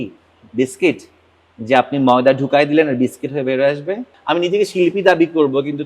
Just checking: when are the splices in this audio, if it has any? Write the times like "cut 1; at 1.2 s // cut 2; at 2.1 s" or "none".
cut 1; at 4.1 s